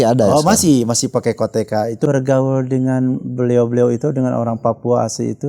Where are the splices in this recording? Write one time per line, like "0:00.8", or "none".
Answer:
0:02.1